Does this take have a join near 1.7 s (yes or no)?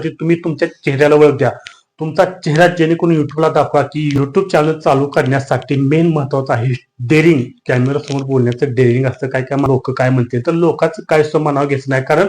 no